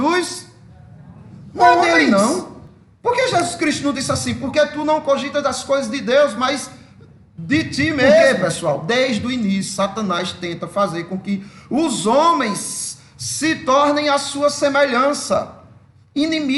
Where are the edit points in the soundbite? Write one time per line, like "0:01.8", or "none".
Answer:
0:01.9
0:08.2